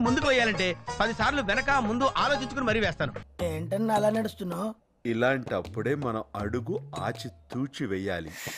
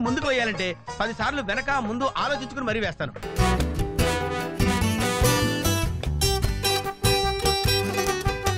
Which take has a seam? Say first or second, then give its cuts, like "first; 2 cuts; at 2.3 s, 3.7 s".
first; 1 cut; at 3.2 s